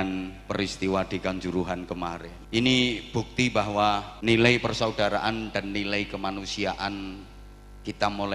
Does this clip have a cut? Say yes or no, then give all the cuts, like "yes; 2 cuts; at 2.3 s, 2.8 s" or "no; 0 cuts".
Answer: yes; 2 cuts; at 2.3 s, 4.1 s